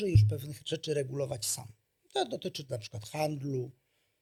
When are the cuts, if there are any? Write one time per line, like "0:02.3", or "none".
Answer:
none